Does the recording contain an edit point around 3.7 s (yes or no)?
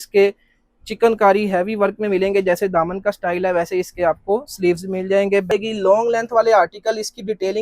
no